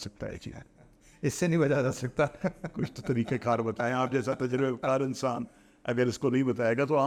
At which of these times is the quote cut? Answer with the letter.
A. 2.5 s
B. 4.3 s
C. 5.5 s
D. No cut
D